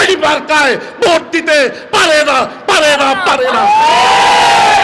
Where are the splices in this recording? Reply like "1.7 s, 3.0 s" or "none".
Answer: none